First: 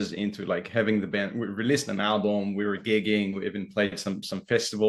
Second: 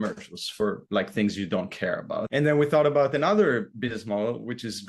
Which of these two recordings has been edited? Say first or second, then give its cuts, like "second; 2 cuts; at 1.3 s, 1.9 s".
second; 1 cut; at 2.3 s